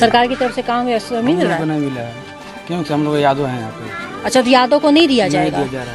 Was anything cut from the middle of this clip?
no; 0 cuts

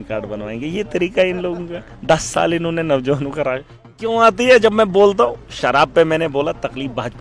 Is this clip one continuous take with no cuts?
no; 1 cut; at 4.0 s

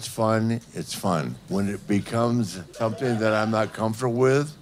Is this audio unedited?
no; 2 cuts; at 1.4 s, 2.6 s

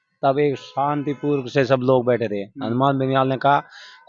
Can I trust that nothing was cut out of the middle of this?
yes; 0 cuts

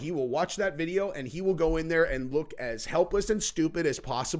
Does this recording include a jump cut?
no; 0 cuts

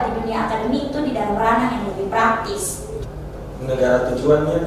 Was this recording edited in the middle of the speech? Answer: yes; 1 cut; at 3.0 s

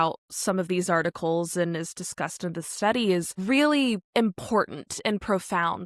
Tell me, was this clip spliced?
yes; 2 cuts; at 3.3 s, 4.0 s

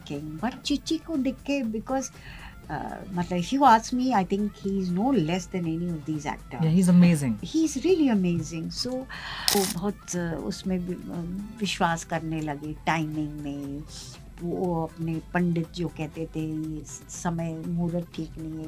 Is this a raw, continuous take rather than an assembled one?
no; 1 cut; at 9.5 s

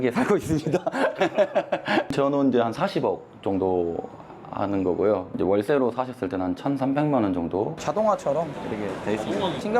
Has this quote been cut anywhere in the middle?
yes; 2 cuts; at 2.1 s, 7.7 s

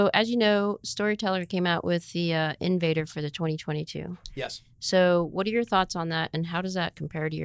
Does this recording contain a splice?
no; 0 cuts

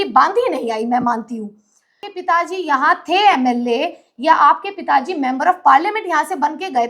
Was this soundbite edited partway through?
yes; 1 cut; at 2.1 s

